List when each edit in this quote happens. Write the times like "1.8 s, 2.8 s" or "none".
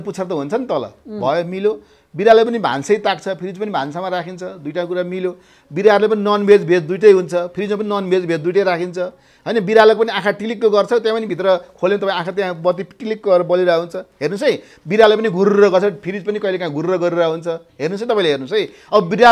none

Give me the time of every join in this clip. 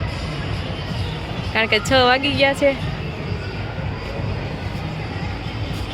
none

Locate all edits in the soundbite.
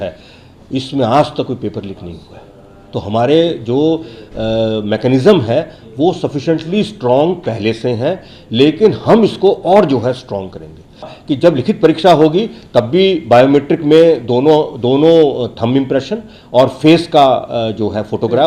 11.1 s

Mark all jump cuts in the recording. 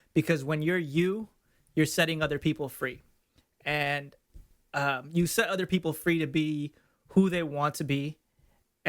none

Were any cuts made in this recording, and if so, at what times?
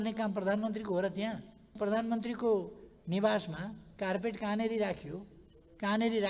1.8 s

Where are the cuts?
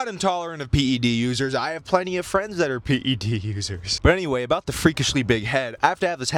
none

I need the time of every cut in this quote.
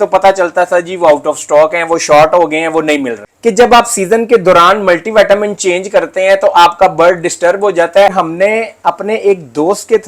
3.2 s, 8.1 s

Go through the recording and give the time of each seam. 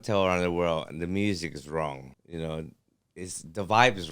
2.1 s

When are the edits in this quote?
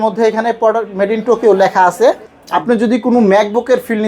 2.3 s

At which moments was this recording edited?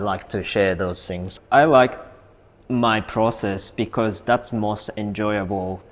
1.3 s

